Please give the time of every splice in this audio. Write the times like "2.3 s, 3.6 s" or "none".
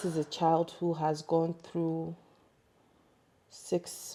none